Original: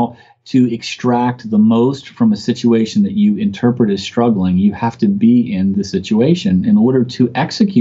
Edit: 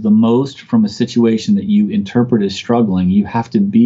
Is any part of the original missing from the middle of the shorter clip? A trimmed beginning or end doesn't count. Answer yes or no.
no